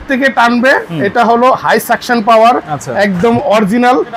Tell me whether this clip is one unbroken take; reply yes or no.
yes